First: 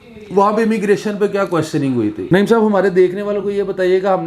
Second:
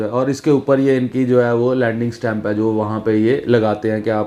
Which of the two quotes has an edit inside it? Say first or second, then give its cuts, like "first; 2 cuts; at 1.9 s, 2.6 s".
first; 1 cut; at 2.2 s